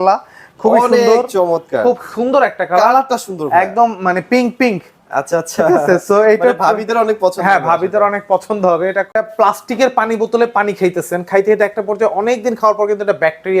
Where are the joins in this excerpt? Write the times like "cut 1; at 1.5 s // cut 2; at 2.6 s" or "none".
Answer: cut 1; at 9.1 s